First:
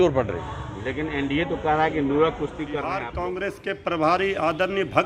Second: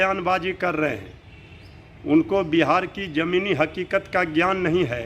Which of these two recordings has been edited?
first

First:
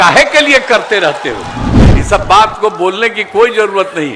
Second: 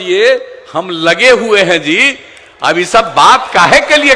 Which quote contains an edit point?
first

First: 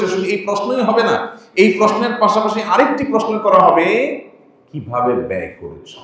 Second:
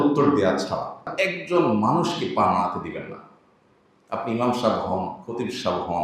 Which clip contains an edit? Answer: second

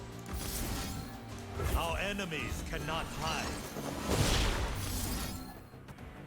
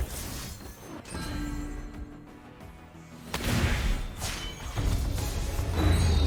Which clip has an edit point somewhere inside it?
first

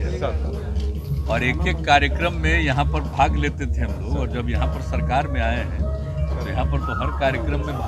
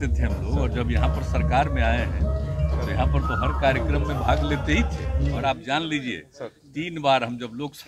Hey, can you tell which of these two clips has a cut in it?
second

